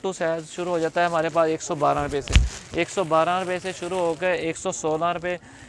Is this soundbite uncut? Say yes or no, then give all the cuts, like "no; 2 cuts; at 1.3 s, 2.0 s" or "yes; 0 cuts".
yes; 0 cuts